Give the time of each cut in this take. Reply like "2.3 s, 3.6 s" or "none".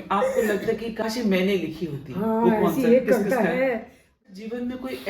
1.0 s, 4.2 s